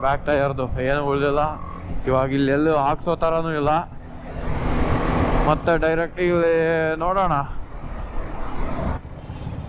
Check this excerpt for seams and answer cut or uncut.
uncut